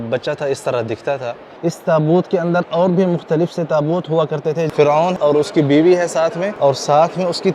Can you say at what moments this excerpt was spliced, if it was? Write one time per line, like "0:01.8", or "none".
0:01.5
0:05.1
0:06.5